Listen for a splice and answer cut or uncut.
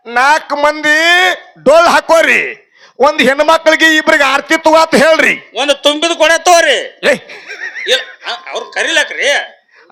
uncut